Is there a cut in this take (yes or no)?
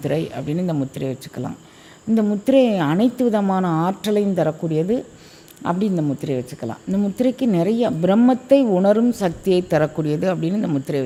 no